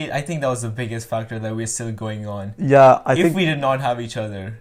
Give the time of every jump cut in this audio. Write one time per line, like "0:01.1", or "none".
none